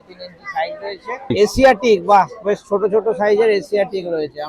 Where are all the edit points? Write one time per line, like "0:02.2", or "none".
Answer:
0:01.3